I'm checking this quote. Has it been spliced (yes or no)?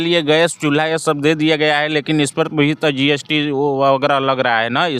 no